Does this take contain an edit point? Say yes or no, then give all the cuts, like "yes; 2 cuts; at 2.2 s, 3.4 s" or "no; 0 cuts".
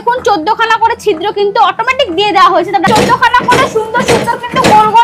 yes; 1 cut; at 2.8 s